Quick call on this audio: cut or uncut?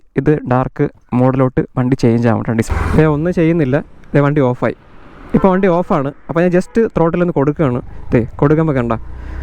cut